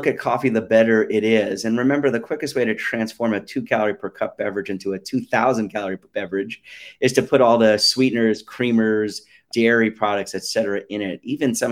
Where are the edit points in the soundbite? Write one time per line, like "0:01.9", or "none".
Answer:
0:06.1
0:09.4